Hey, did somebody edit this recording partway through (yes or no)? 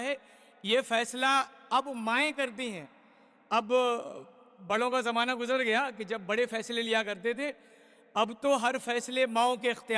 no